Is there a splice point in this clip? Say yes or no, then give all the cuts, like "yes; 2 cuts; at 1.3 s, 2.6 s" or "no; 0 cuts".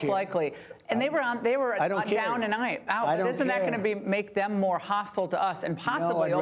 no; 0 cuts